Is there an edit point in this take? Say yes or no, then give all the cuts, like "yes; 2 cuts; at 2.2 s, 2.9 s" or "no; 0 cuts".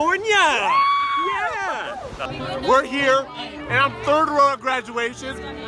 yes; 1 cut; at 2.3 s